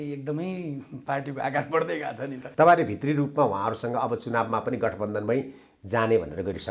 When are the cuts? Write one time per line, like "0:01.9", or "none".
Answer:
0:02.4